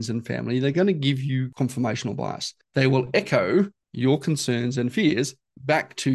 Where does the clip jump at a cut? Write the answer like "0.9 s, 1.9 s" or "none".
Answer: 1.5 s, 2.8 s, 3.8 s